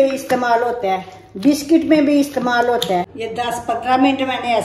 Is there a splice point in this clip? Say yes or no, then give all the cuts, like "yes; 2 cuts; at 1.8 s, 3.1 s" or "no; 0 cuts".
yes; 1 cut; at 3.2 s